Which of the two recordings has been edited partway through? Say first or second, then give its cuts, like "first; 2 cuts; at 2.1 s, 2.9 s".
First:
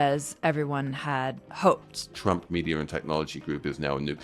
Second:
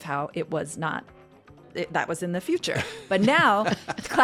first; 2 cuts; at 1.4 s, 2.2 s